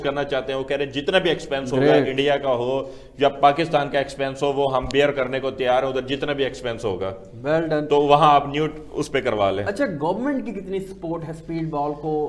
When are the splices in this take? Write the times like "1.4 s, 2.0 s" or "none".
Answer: none